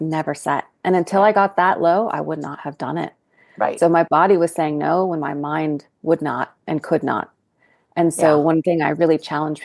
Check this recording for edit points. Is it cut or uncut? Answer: uncut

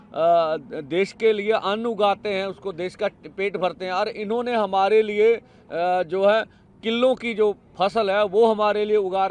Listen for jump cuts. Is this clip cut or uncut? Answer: uncut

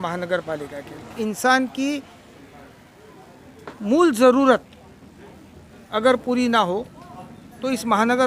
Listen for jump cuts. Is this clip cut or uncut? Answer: cut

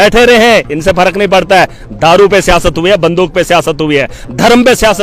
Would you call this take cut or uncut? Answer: uncut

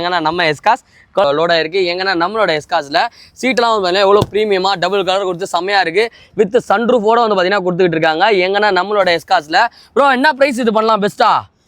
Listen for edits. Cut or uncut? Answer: cut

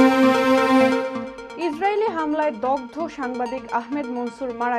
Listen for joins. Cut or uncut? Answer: uncut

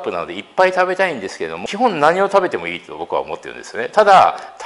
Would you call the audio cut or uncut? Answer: cut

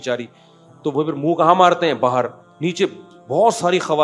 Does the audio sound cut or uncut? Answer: cut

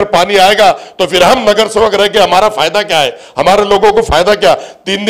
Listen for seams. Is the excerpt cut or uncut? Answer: uncut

